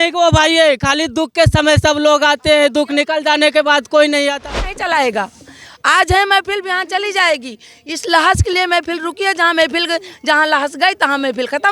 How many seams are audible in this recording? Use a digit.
1